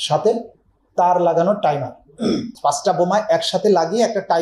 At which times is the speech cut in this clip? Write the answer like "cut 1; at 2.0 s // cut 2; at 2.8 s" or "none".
cut 1; at 2.5 s

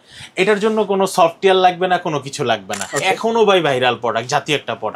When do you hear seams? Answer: cut 1; at 2.7 s

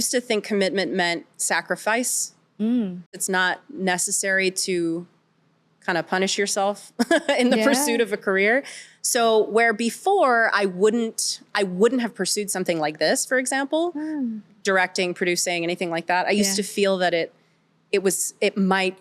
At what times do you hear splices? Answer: cut 1; at 3.2 s

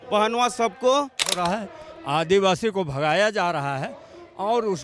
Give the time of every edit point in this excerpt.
cut 1; at 1.4 s

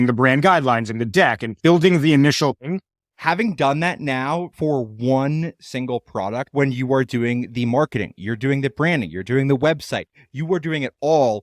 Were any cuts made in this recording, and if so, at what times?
cut 1; at 1.5 s // cut 2; at 2.7 s // cut 3; at 6.5 s

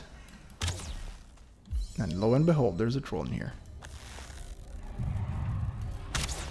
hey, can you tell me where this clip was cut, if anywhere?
cut 1; at 1.2 s

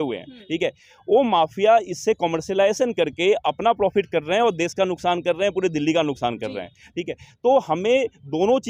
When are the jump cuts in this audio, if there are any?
none

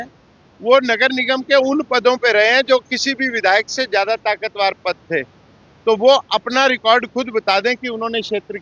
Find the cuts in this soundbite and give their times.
none

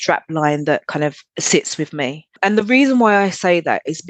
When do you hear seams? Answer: cut 1; at 1.2 s // cut 2; at 2.4 s

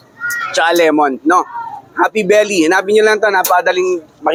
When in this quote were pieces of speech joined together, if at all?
none

